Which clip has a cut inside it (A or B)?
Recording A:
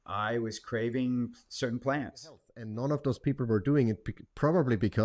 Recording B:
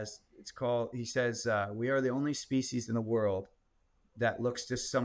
A